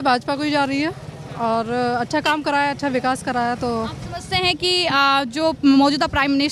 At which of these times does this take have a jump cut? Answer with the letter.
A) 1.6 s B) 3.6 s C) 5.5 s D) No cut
D